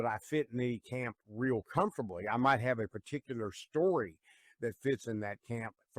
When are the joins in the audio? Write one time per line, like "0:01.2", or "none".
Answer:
none

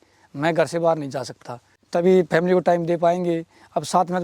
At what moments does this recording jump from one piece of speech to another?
0:01.7

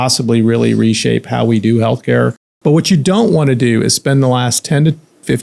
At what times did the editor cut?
0:02.4

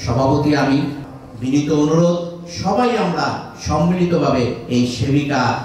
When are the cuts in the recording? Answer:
0:01.0

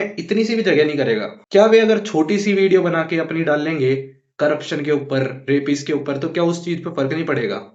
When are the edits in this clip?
none

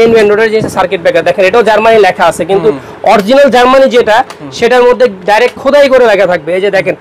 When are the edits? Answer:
none

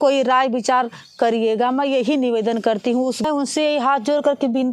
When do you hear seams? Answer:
0:03.2

